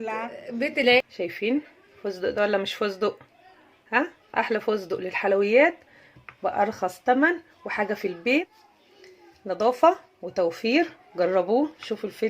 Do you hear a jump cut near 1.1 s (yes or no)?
yes